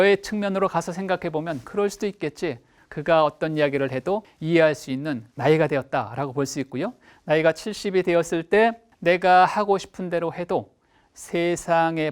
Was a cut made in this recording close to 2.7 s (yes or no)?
yes